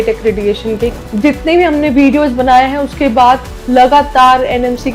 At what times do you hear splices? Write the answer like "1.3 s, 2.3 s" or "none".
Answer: 1.0 s